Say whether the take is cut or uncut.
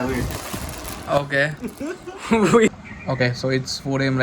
cut